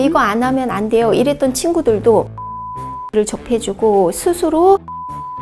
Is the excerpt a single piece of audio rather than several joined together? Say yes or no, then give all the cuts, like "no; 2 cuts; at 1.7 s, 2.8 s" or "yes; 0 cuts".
yes; 0 cuts